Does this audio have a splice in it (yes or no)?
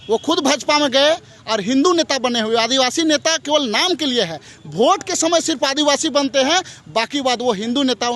no